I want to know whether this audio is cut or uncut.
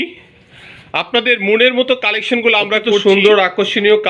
cut